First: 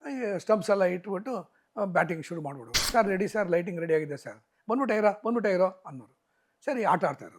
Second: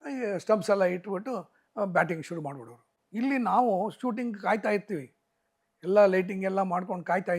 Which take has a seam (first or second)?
first